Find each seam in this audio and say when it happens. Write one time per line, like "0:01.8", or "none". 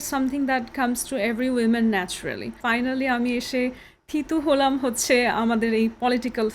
0:02.6